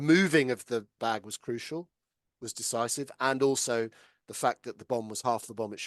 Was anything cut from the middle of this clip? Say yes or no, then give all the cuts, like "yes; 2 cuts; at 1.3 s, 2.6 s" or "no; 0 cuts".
yes; 1 cut; at 0.9 s